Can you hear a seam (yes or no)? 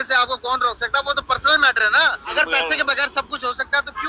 yes